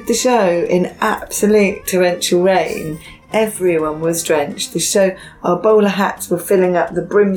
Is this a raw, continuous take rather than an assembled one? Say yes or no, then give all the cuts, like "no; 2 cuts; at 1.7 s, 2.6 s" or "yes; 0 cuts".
yes; 0 cuts